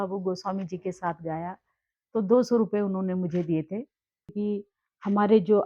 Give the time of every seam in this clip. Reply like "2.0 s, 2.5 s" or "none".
4.3 s